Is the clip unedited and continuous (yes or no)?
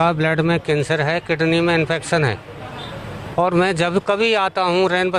yes